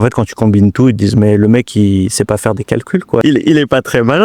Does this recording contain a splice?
yes; 1 cut; at 3.2 s

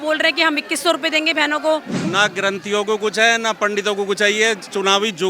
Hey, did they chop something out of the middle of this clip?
yes; 1 cut; at 2.0 s

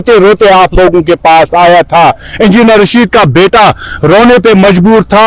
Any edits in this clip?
no; 0 cuts

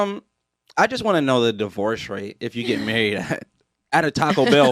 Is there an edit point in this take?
no; 0 cuts

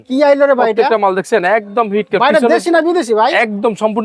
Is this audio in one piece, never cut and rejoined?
yes; 0 cuts

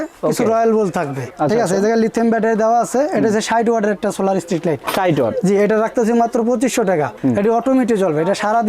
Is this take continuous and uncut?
no; 2 cuts; at 1.2 s, 7.1 s

